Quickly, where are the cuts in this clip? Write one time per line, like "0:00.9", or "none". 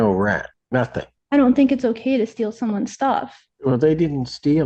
0:00.8
0:03.4

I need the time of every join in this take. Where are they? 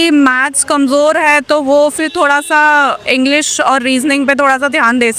none

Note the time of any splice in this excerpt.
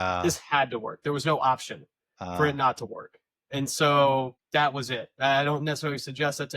0:04.4

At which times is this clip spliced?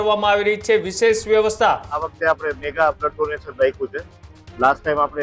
0:02.1

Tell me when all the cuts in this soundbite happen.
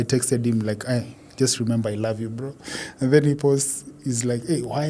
none

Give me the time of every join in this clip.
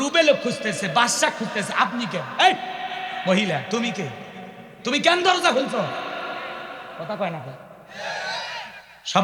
none

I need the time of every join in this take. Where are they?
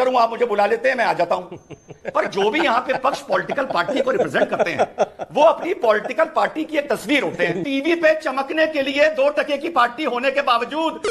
0:07.6

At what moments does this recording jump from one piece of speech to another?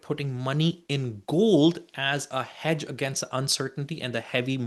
none

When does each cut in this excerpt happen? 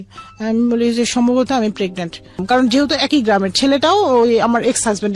0:02.4

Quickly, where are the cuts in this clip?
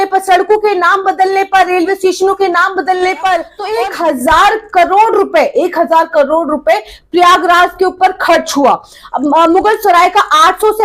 0:03.6

